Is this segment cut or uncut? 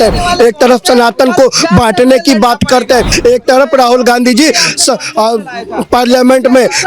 cut